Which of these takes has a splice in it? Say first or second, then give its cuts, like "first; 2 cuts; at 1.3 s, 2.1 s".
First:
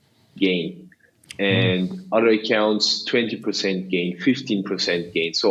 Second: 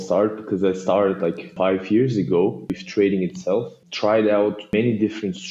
second; 4 cuts; at 1.5 s, 2.7 s, 3.8 s, 4.7 s